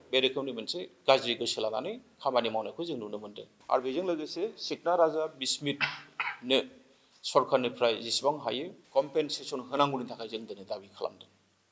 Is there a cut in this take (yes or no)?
yes